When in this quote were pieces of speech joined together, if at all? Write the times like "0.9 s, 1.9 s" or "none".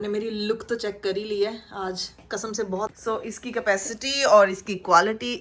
2.9 s